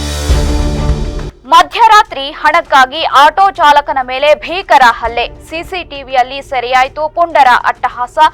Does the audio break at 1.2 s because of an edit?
yes; 1 cut; at 1.2 s

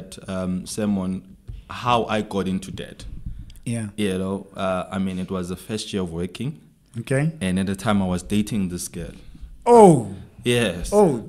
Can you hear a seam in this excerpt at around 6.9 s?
no; 0 cuts

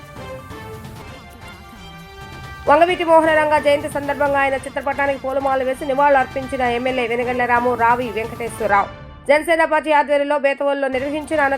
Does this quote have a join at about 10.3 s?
no; 1 cut; at 1.0 s

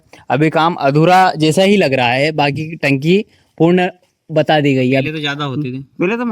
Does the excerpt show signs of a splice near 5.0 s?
yes; 1 cut; at 5.0 s

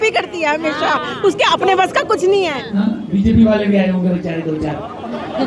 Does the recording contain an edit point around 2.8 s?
yes; 1 cut; at 2.8 s

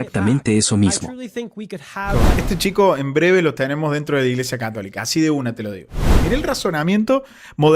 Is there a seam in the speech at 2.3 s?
yes; 2 cuts; at 2.3 s, 6.1 s

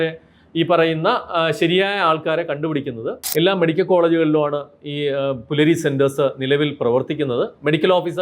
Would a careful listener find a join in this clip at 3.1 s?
yes; 1 cut; at 3.1 s

